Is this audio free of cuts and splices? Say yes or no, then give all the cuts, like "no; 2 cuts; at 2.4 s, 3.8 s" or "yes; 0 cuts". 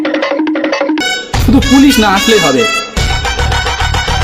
no; 1 cut; at 1.0 s